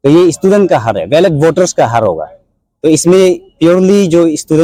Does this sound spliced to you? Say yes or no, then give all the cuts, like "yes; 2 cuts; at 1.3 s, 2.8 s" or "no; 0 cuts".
no; 0 cuts